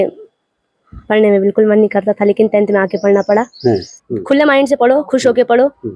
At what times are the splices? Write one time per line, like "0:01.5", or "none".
0:03.9